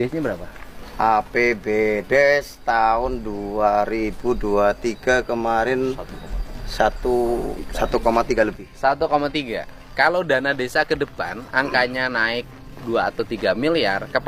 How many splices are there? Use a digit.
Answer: 0